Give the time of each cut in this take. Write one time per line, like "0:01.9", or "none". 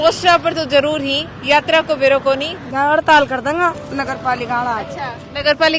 0:02.6